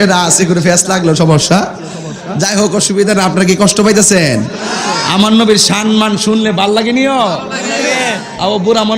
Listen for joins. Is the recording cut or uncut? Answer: uncut